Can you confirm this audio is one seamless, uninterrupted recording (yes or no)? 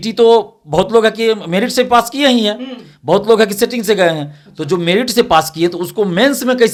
yes